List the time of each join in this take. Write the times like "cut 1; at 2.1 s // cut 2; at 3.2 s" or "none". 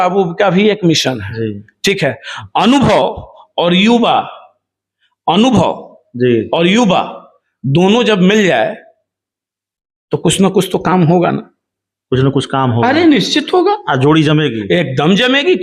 none